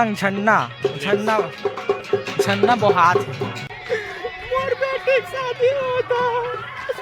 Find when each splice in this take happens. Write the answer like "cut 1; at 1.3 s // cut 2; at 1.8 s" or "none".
cut 1; at 3.8 s